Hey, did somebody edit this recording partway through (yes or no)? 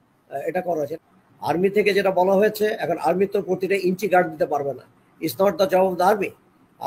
yes